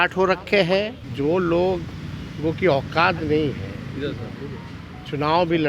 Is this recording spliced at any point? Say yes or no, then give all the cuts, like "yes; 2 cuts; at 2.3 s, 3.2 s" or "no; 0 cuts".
yes; 1 cut; at 1.0 s